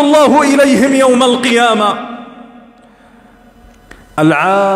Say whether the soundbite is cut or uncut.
uncut